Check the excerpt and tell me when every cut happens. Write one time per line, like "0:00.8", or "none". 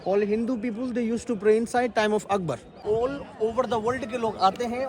0:02.7

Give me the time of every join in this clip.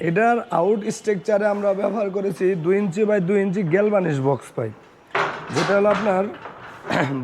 none

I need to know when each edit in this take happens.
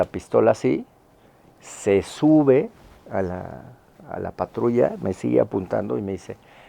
none

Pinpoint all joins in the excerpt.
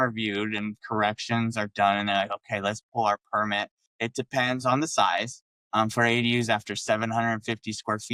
none

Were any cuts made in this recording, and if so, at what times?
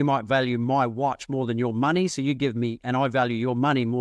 none

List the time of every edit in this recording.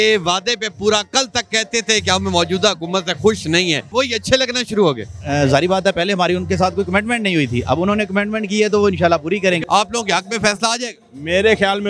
0:03.9
0:09.6

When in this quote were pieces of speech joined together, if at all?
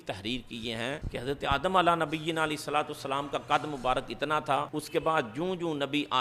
0:01.0
0:04.8

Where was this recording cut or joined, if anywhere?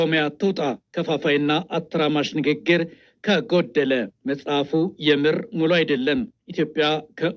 none

